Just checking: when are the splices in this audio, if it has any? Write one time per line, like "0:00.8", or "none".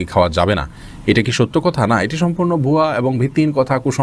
none